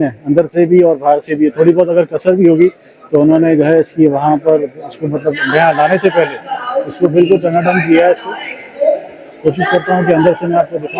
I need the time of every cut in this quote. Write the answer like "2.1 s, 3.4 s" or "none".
none